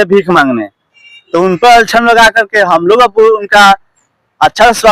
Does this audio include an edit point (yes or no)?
no